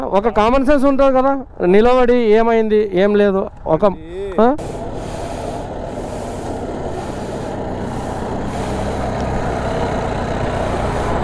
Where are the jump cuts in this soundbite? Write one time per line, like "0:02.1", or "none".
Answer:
0:04.6

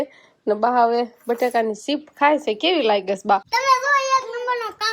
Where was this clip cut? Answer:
0:03.5

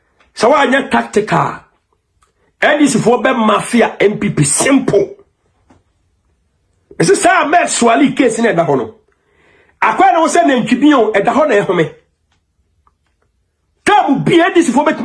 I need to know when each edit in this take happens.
none

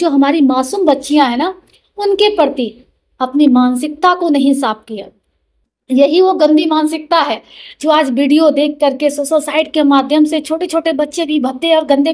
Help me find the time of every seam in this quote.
none

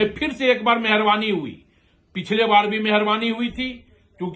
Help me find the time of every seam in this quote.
none

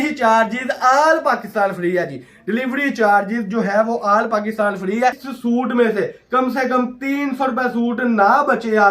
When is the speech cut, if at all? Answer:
0:05.3

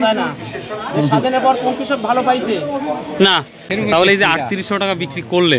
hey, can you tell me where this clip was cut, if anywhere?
0:03.7

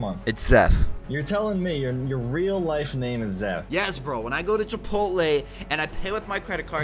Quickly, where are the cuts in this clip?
none

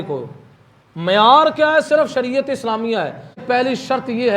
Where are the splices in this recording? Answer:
0:03.4

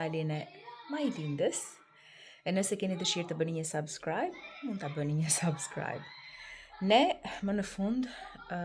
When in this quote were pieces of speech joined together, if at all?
none

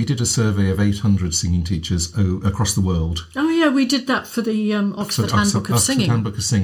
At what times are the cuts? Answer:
none

